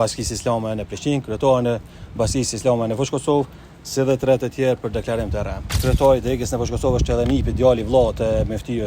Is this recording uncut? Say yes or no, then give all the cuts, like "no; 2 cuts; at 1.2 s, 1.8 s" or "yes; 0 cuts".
no; 1 cut; at 5.6 s